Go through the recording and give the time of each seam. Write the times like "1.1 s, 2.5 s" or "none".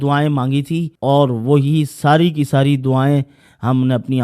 0.9 s

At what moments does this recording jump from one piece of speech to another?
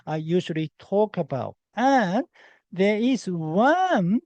1.6 s

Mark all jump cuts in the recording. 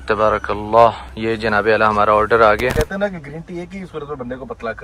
1.1 s, 2.7 s

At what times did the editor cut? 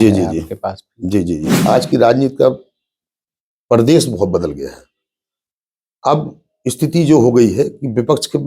1.5 s

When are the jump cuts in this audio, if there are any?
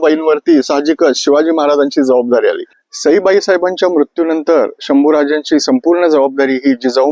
2.7 s

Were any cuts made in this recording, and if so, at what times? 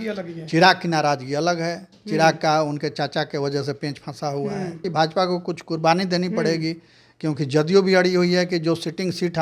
4.8 s

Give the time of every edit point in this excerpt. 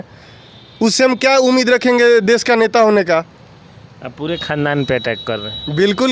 none

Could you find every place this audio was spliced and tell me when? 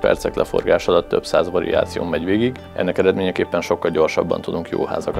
2.6 s

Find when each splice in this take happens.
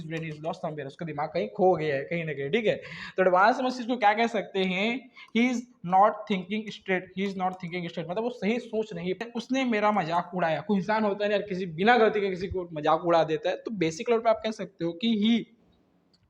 9.2 s

